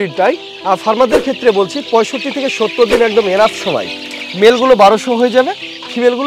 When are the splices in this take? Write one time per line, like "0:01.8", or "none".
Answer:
none